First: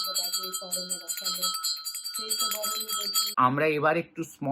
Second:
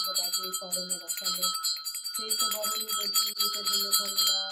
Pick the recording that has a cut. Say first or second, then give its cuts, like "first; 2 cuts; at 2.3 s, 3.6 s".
first; 1 cut; at 3.3 s